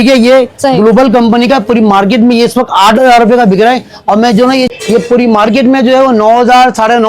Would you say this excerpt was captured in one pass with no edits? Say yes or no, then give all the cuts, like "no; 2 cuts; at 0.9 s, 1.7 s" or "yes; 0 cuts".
no; 1 cut; at 4.7 s